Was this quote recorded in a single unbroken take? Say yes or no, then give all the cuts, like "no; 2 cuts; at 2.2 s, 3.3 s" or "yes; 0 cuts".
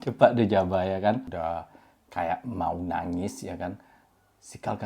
no; 1 cut; at 1.3 s